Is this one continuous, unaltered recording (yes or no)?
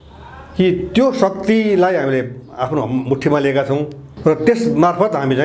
no